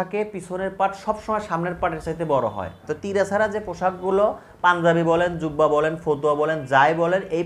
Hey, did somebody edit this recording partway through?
yes; 1 cut; at 2.9 s

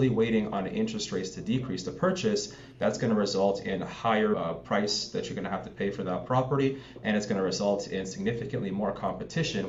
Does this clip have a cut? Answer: no; 0 cuts

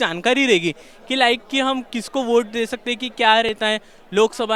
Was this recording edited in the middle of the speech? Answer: no; 0 cuts

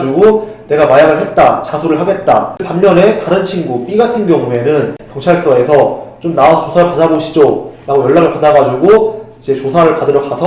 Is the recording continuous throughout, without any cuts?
no; 2 cuts; at 2.6 s, 5.0 s

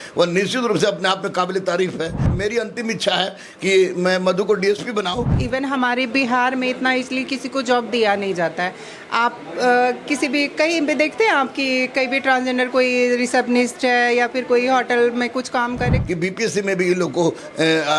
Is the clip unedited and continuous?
no; 3 cuts; at 2.3 s, 5.3 s, 16.0 s

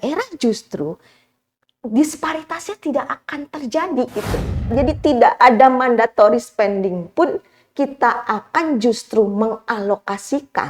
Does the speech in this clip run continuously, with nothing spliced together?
no; 1 cut; at 4.7 s

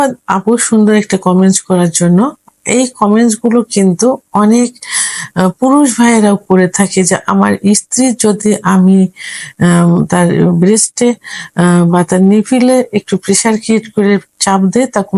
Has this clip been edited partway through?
no; 0 cuts

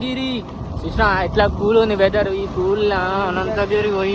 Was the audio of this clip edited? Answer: no; 0 cuts

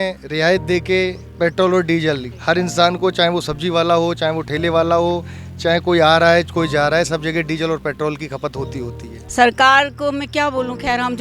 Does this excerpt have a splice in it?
yes; 2 cuts; at 2.3 s, 9.2 s

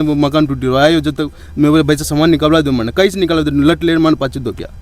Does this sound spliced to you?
no; 0 cuts

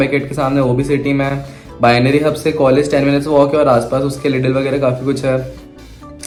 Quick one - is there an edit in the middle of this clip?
no; 0 cuts

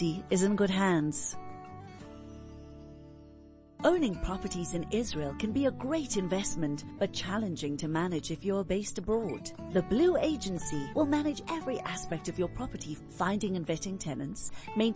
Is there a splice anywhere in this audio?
no; 0 cuts

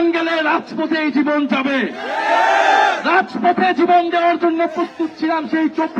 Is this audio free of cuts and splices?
yes; 0 cuts

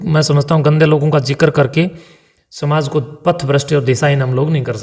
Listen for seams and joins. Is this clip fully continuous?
yes; 0 cuts

